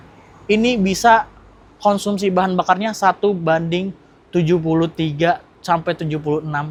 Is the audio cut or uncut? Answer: uncut